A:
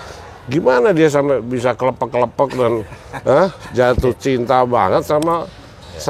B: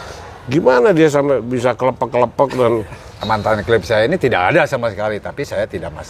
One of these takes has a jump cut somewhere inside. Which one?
B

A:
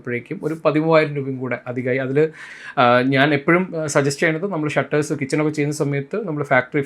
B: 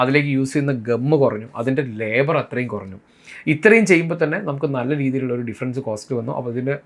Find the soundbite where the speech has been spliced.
A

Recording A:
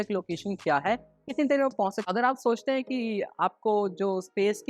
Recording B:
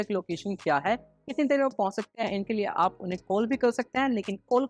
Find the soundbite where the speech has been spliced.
A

